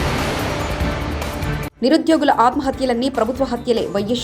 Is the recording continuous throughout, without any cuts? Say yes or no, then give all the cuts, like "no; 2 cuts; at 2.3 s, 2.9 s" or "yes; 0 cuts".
no; 1 cut; at 1.6 s